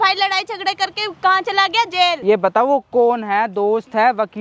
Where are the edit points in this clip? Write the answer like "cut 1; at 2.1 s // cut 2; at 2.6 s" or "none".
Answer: cut 1; at 2.2 s